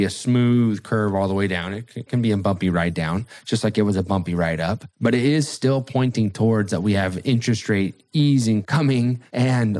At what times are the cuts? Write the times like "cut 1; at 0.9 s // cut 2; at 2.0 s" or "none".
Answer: cut 1; at 4.9 s // cut 2; at 8.8 s